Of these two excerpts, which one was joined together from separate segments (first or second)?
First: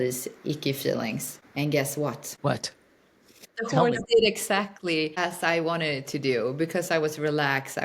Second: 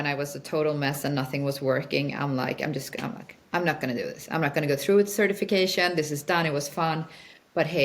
first